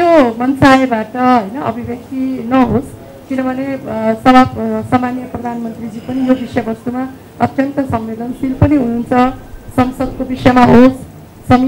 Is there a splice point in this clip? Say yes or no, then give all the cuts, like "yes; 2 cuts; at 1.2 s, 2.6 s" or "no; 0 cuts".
no; 0 cuts